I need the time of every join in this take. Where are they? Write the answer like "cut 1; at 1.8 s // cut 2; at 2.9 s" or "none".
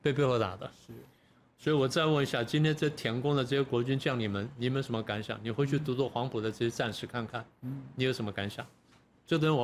none